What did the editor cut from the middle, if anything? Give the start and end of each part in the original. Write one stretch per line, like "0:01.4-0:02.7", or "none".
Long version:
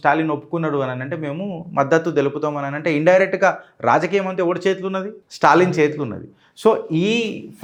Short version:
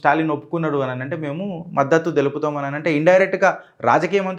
none